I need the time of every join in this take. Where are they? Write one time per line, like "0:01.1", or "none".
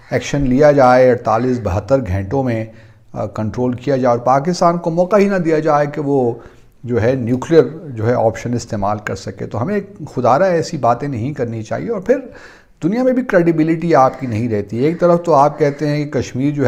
none